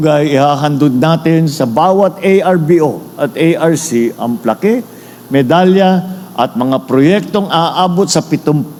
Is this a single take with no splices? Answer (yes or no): yes